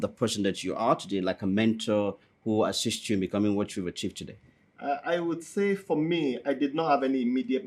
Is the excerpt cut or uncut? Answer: uncut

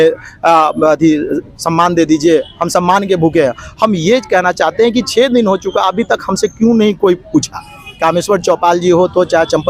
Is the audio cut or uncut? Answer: uncut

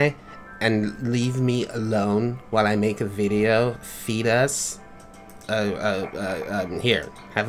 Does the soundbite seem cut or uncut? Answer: uncut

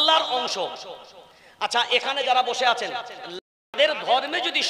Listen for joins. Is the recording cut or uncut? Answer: cut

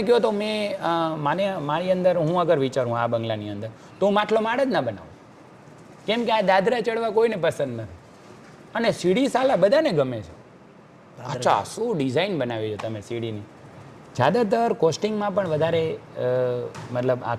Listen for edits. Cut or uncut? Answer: uncut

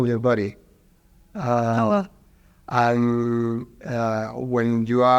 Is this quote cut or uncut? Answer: uncut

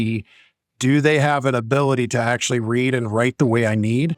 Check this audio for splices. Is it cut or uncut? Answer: uncut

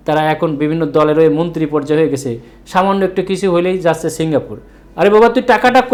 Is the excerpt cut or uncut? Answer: uncut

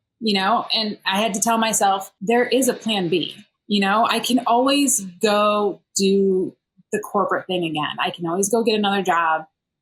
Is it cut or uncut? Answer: cut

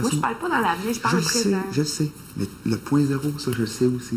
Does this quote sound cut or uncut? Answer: uncut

